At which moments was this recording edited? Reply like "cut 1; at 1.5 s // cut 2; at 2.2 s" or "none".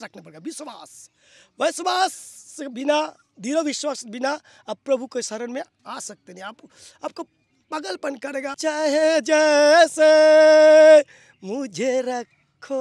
cut 1; at 8.6 s

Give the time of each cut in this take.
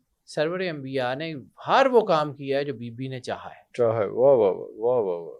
none

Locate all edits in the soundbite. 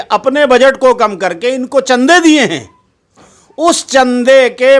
none

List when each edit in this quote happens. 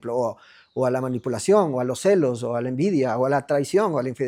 none

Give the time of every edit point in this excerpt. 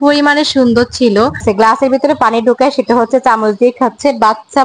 cut 1; at 1.4 s

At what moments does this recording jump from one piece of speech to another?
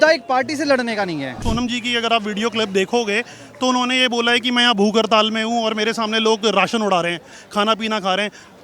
cut 1; at 1.4 s

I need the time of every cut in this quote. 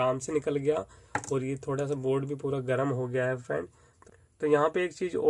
none

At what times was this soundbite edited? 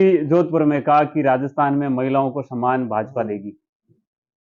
none

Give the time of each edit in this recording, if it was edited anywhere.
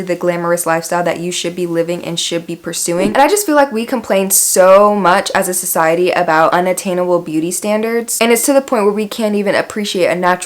cut 1; at 3.1 s // cut 2; at 8.1 s

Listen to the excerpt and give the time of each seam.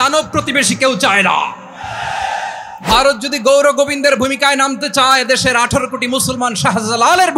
cut 1; at 2.7 s

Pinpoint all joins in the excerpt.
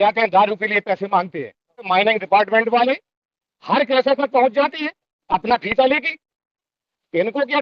cut 1; at 1.8 s

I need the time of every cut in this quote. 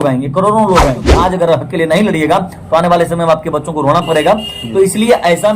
cut 1; at 1.1 s

